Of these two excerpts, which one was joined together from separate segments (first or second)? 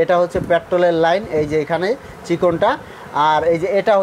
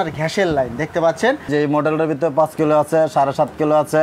second